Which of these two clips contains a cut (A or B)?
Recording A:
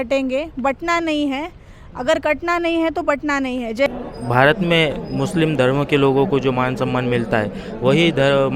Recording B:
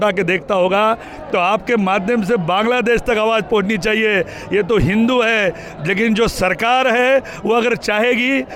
A